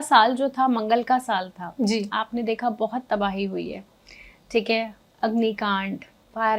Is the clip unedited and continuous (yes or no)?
yes